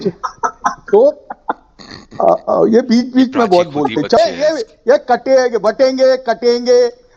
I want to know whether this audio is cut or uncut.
cut